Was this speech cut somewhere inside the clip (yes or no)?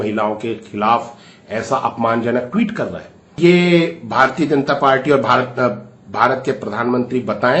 yes